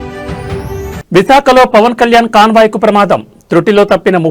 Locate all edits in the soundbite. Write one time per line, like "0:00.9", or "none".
0:00.9